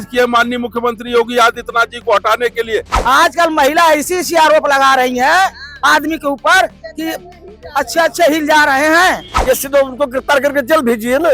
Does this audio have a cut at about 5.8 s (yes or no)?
no